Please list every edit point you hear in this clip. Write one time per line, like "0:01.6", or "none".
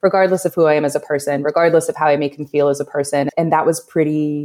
0:03.3